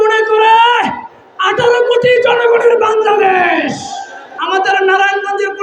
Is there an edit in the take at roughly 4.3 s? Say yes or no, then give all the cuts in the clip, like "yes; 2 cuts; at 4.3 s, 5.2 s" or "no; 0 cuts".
yes; 1 cut; at 4.3 s